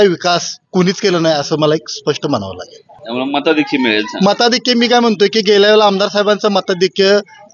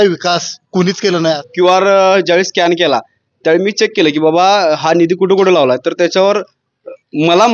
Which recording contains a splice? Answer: second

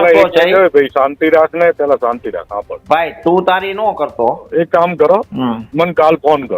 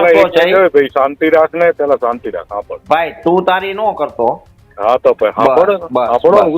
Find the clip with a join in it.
first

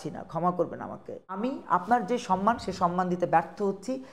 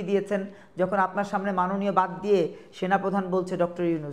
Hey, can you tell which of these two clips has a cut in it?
first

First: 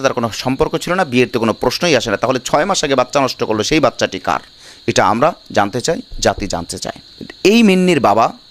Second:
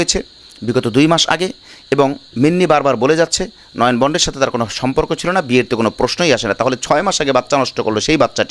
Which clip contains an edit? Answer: first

